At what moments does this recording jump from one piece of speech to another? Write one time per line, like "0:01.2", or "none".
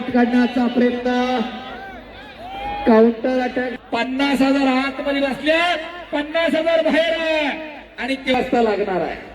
0:03.7
0:08.3